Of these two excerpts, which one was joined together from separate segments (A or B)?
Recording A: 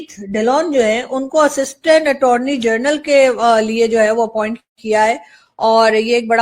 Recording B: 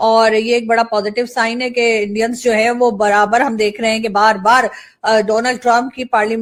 A